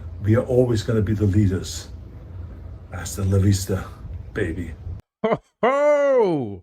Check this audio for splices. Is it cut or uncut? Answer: cut